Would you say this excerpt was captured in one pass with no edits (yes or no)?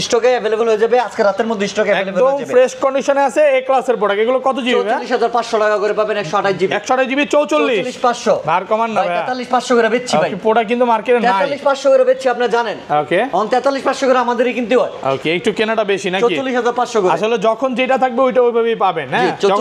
yes